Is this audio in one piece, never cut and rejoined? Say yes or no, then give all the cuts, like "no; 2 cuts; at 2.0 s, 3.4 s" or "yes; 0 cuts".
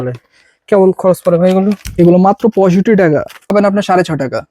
no; 1 cut; at 3.5 s